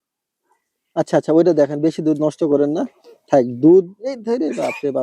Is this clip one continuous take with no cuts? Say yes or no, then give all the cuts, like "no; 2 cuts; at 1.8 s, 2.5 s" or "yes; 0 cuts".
yes; 0 cuts